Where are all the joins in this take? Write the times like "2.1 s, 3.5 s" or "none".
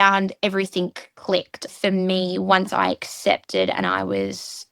1.7 s

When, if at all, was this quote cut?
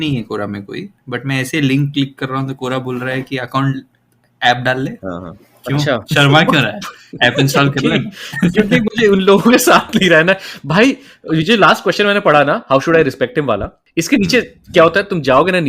13.8 s

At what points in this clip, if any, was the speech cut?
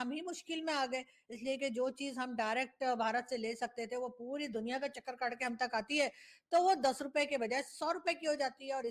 none

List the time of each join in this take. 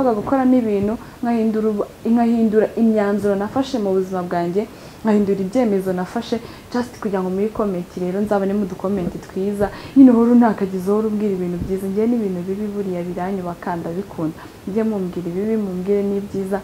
9.8 s

